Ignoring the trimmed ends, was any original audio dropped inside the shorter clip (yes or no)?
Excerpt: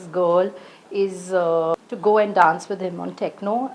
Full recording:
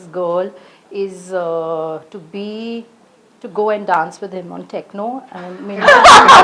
yes